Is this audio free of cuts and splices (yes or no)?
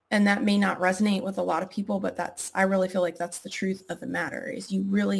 yes